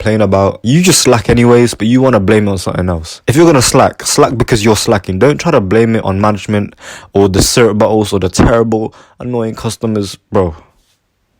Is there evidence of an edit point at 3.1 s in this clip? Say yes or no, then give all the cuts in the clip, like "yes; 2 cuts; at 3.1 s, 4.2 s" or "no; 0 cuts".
no; 0 cuts